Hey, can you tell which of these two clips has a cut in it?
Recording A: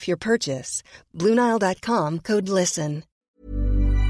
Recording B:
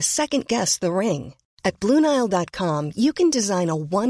A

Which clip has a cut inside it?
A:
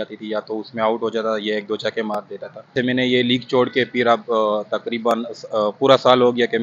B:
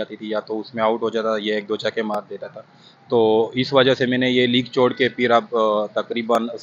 A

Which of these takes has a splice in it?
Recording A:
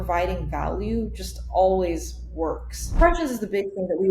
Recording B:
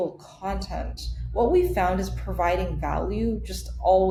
A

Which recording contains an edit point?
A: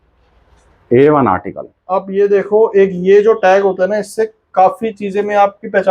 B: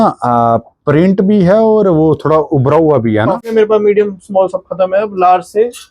B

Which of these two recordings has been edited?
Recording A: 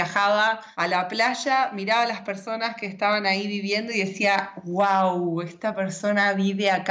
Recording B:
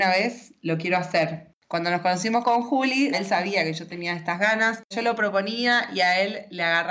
B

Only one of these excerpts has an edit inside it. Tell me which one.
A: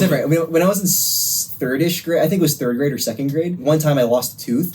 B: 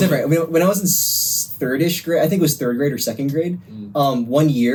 A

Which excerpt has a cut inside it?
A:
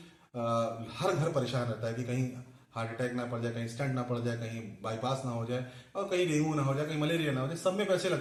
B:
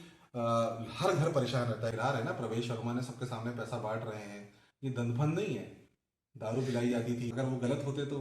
B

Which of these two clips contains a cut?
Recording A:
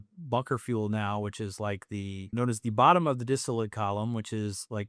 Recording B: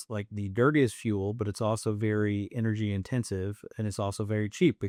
A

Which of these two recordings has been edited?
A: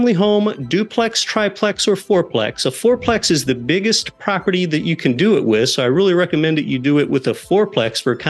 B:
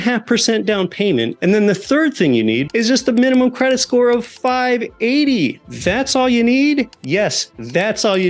B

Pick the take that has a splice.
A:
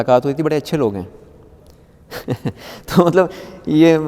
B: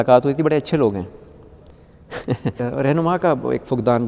B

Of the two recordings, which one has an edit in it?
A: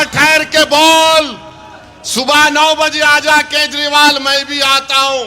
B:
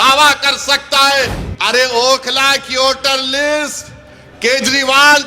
B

